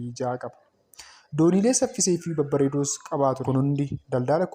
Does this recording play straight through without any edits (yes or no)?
no